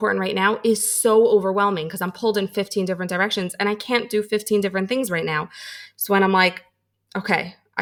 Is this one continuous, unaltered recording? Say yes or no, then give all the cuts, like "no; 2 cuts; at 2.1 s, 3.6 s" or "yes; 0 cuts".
yes; 0 cuts